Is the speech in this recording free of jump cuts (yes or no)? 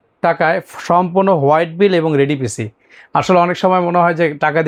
yes